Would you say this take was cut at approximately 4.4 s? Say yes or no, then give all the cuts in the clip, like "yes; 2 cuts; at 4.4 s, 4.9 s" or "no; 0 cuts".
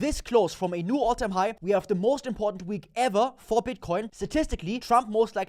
yes; 2 cuts; at 1.6 s, 4.4 s